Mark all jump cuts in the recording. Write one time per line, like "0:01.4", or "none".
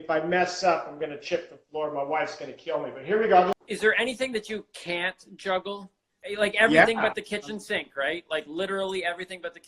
0:03.6
0:06.2